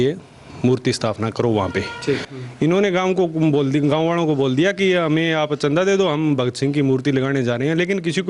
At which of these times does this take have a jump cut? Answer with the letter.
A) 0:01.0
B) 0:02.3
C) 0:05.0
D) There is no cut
B